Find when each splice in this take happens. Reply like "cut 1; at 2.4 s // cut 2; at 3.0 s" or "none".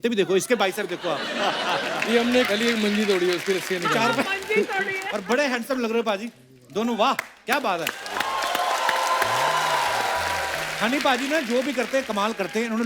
cut 1; at 10.7 s